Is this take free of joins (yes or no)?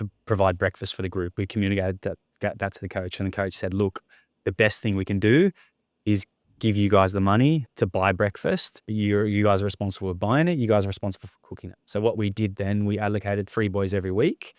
no